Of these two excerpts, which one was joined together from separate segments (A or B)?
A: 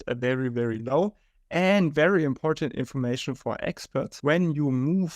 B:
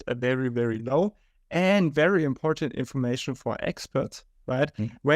A